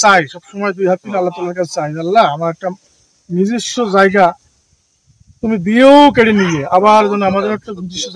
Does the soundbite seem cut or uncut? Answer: uncut